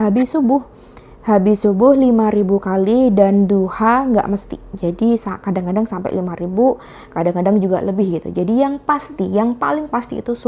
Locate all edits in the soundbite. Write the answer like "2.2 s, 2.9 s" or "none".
none